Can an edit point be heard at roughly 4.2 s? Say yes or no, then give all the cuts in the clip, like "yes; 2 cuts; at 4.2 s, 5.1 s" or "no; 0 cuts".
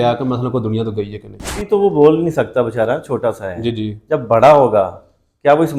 no; 1 cut; at 1.6 s